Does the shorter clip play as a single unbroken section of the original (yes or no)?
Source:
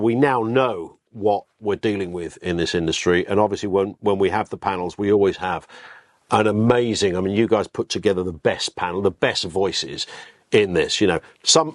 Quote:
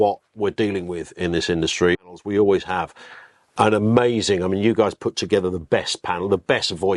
no